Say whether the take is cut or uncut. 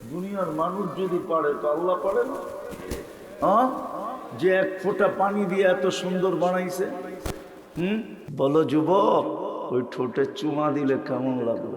cut